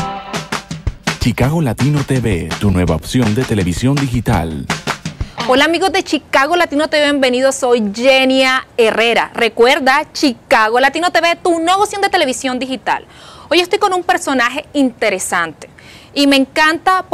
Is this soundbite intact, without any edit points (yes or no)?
yes